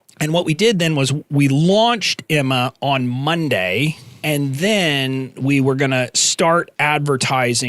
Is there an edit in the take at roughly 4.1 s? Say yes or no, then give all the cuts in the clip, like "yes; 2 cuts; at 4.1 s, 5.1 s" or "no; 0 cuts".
yes; 1 cut; at 4.1 s